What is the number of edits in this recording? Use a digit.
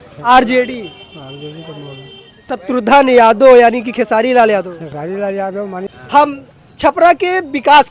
1